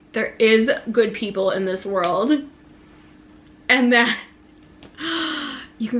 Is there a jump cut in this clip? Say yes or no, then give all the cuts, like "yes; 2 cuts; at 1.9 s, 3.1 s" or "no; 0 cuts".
no; 0 cuts